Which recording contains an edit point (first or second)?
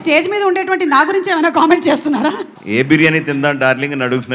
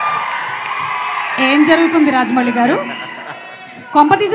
first